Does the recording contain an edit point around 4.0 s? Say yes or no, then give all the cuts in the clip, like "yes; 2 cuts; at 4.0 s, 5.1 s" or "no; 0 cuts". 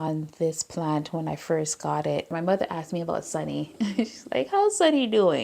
no; 1 cut; at 2.3 s